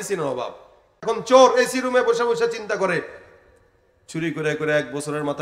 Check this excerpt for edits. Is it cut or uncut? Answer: cut